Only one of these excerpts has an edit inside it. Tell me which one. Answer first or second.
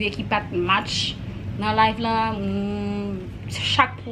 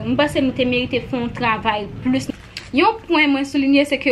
second